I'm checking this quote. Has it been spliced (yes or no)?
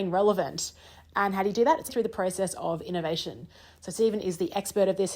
yes